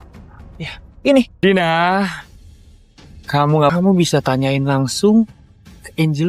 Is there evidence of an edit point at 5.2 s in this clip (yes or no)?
no